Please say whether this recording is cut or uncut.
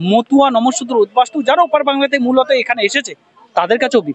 uncut